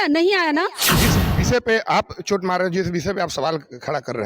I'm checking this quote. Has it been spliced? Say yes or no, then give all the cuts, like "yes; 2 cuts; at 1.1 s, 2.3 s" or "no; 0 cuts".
yes; 1 cut; at 1.0 s